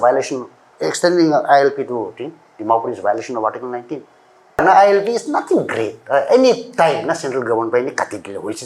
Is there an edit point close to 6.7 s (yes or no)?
no